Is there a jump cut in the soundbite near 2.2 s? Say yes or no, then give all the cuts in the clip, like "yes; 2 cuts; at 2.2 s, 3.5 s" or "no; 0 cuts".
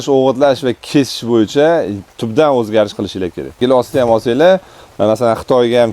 no; 1 cut; at 3.6 s